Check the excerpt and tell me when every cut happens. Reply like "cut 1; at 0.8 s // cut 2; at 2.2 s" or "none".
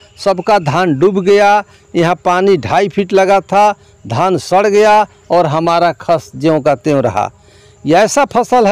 none